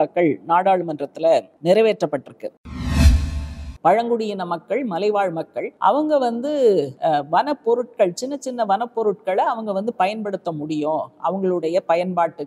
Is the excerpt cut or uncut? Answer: cut